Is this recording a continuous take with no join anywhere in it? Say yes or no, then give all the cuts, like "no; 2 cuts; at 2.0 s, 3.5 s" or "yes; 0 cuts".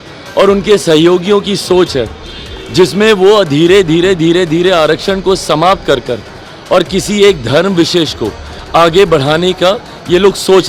yes; 0 cuts